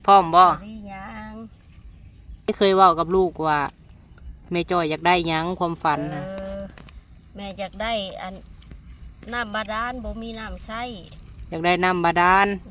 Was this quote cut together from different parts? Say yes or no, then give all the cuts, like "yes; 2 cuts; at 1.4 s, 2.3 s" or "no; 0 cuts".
yes; 1 cut; at 2.5 s